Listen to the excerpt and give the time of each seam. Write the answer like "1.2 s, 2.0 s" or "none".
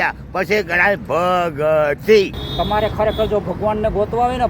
2.4 s